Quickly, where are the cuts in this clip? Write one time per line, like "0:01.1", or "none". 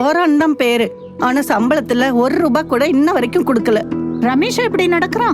0:03.9